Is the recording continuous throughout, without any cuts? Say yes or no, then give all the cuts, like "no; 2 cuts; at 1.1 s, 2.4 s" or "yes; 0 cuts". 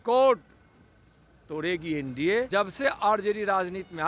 no; 1 cut; at 2.5 s